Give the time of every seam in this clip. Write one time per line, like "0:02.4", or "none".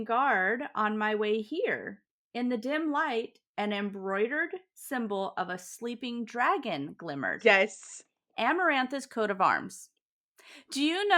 none